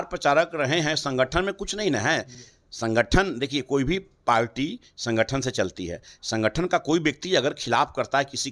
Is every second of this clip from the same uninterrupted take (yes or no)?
yes